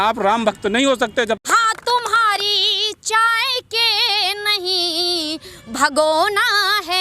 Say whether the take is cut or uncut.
cut